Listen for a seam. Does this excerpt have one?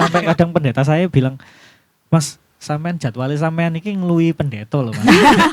no; 0 cuts

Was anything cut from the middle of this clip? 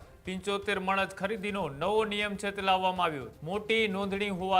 yes; 1 cut; at 3.3 s

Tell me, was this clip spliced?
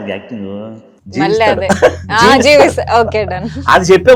no; 0 cuts

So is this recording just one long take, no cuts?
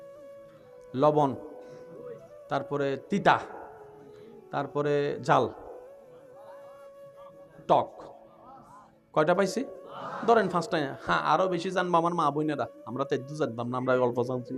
no; 3 cuts; at 0.9 s, 6.2 s, 7.5 s

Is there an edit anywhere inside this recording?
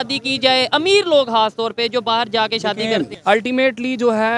yes; 1 cut; at 3.1 s

